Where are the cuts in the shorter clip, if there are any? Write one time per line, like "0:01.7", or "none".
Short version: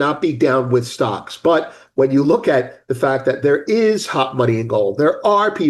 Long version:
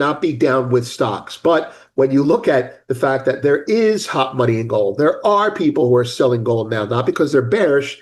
none